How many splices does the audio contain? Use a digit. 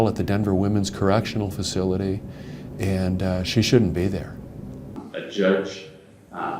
1